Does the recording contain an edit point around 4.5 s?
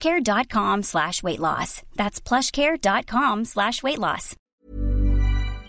yes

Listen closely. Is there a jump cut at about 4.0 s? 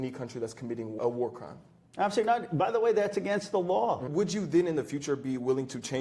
yes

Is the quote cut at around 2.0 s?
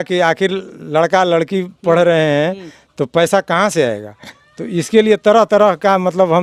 no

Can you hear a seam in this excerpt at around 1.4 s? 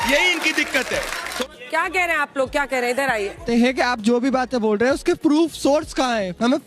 yes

